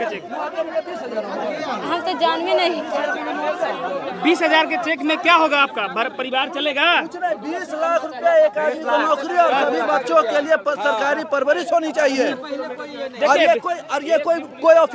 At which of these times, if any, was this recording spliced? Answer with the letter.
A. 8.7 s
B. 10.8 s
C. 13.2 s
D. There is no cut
D